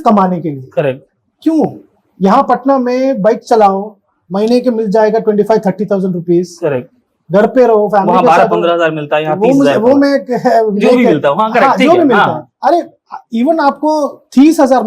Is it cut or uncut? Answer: uncut